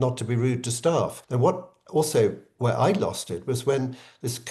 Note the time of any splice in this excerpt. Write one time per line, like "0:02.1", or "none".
0:01.2